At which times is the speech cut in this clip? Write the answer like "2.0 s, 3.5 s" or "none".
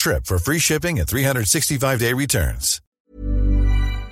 2.8 s